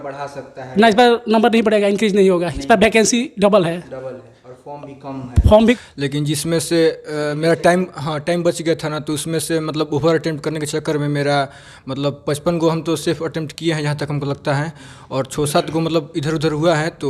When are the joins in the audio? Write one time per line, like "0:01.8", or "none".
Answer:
0:05.8